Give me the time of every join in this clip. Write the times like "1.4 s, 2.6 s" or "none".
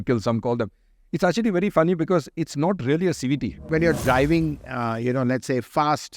3.6 s